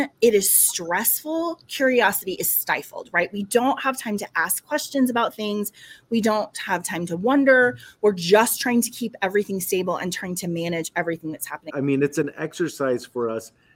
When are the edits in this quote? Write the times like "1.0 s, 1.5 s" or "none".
11.6 s